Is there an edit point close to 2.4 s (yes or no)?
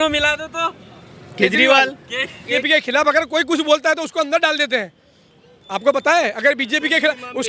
yes